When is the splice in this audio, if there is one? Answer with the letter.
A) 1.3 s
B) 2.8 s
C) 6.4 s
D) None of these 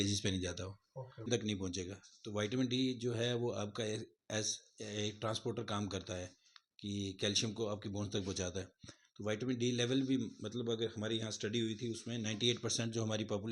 A